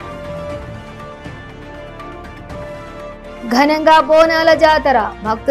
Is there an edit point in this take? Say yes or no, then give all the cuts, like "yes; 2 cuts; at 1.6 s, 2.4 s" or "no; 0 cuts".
yes; 1 cut; at 1.6 s